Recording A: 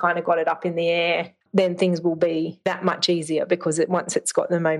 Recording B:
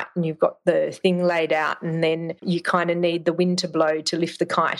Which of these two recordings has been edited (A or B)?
A